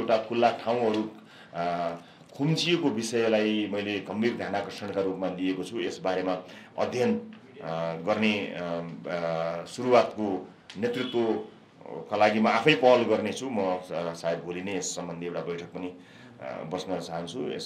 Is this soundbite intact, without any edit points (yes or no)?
yes